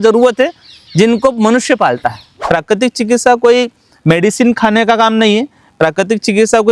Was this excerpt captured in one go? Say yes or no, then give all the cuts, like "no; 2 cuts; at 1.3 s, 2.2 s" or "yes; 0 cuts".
no; 1 cut; at 2.4 s